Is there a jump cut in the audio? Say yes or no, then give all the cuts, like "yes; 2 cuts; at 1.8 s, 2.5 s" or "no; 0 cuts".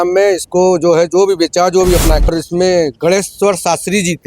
yes; 1 cut; at 2.3 s